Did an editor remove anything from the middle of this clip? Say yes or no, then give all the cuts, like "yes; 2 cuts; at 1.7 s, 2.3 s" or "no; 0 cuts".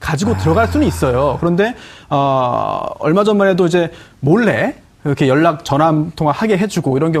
yes; 1 cut; at 2.5 s